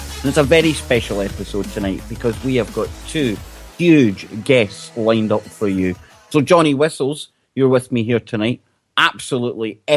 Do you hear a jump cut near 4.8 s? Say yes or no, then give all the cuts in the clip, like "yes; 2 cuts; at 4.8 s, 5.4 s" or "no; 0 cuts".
yes; 1 cut; at 4.8 s